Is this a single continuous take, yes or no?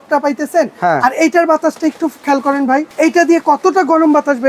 no